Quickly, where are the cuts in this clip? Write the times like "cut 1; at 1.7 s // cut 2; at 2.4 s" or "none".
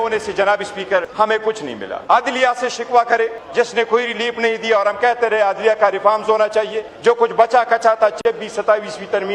cut 1; at 1.4 s // cut 2; at 3.4 s // cut 3; at 6.8 s